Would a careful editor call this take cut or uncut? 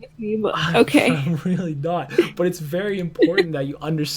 uncut